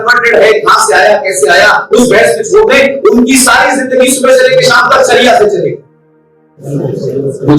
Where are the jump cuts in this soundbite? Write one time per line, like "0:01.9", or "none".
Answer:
0:06.6